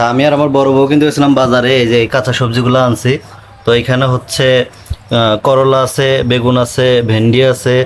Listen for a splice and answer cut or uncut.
uncut